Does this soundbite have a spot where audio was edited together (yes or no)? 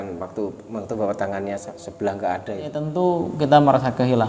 yes